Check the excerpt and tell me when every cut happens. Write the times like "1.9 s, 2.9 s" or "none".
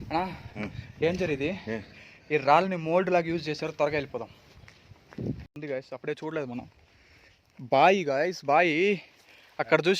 5.6 s